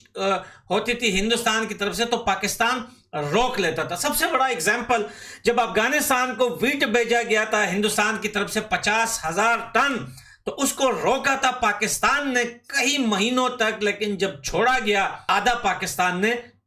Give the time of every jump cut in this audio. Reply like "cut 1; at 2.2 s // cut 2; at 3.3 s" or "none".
cut 1; at 15.2 s